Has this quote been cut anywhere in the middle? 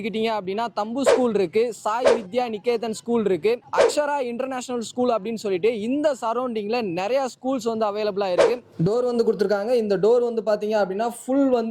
yes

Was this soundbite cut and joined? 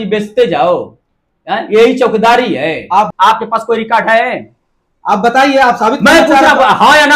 yes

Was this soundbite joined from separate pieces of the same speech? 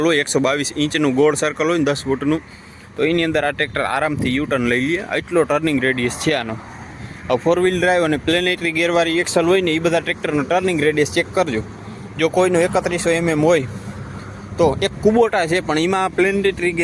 no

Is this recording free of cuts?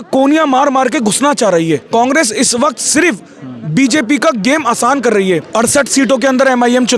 no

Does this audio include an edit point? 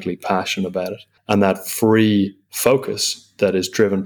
yes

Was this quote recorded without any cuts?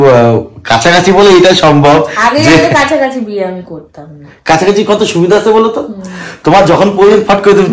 yes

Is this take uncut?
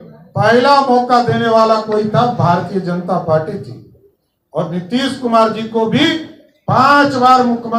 yes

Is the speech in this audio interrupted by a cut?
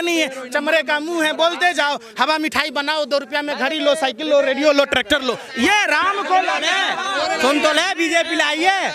yes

